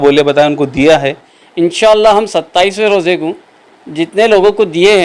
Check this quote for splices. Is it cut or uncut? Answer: cut